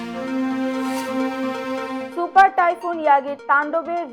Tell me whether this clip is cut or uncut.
cut